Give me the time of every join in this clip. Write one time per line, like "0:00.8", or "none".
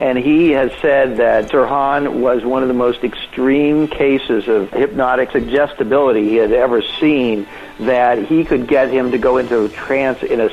0:01.5
0:05.2